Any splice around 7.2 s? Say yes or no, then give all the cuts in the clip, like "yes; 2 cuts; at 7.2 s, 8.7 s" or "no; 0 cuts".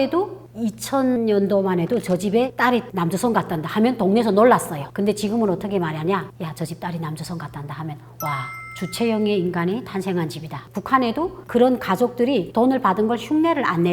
no; 4 cuts; at 1.2 s, 4.8 s, 8.6 s, 10.8 s